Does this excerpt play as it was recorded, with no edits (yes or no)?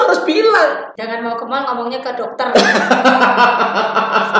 no